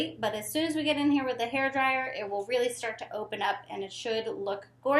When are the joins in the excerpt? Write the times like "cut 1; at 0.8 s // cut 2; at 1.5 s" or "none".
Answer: none